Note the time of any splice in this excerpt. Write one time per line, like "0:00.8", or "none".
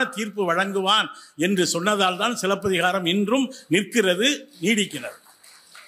none